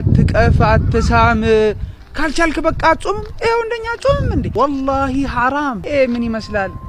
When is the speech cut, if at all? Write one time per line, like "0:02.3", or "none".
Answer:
0:04.5
0:05.8